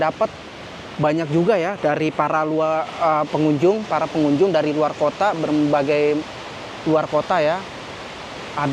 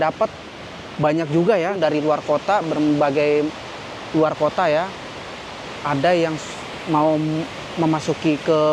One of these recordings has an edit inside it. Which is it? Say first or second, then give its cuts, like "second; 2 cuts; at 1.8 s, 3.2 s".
second; 1 cut; at 1.8 s